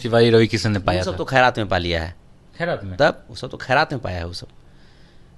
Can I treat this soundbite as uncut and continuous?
yes; 0 cuts

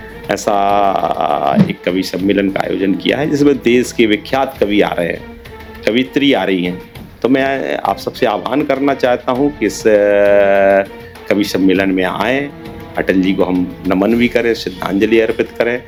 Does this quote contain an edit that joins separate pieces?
no; 0 cuts

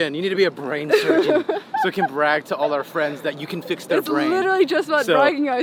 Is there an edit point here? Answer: no; 0 cuts

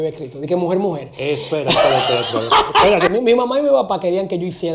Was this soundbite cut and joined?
yes; 1 cut; at 3.1 s

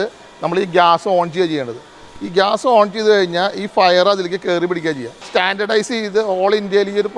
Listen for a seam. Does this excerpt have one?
yes; 1 cut; at 5.1 s

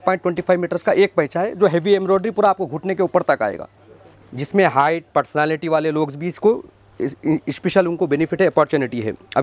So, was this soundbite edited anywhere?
no; 0 cuts

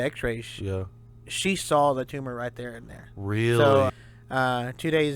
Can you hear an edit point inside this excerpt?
yes; 1 cut; at 3.9 s

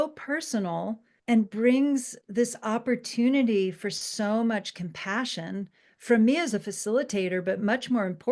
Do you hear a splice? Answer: yes; 2 cuts; at 1.1 s, 2.2 s

